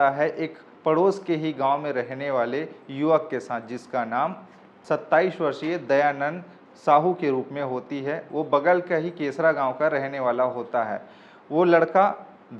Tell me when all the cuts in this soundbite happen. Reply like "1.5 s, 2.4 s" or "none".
none